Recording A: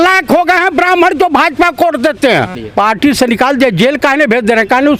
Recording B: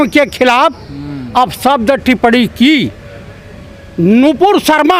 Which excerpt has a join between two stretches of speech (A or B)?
A